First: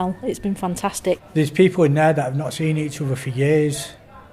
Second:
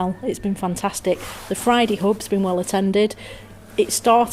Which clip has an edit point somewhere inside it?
first; 1 cut; at 1.2 s

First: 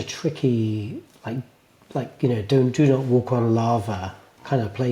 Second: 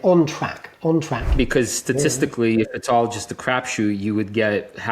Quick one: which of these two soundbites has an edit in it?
second; 1 cut; at 1.3 s

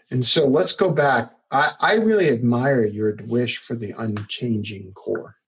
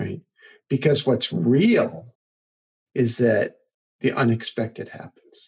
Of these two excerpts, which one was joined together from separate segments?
second; 1 cut; at 3.7 s

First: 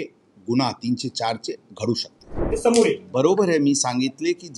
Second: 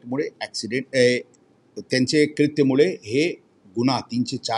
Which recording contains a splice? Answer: first; 1 cut; at 2.5 s

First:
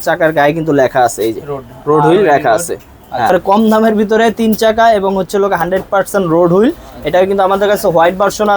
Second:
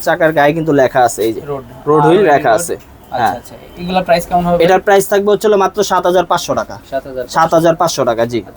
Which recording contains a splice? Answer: first; 1 cut; at 3.3 s

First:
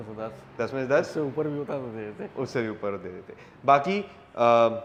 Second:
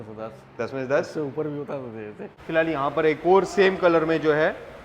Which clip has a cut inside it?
second; 1 cut; at 2.3 s

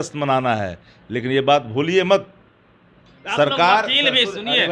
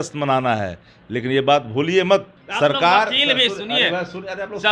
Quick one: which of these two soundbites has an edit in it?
second; 1 cut; at 2.4 s

